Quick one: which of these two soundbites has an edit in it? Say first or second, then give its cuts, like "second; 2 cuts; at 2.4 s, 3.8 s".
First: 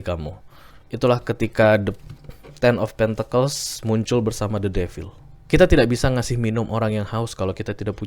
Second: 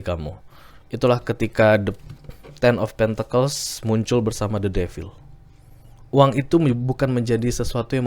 first; 1 cut; at 5.3 s